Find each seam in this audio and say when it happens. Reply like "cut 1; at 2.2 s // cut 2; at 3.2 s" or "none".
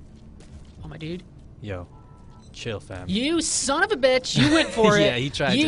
none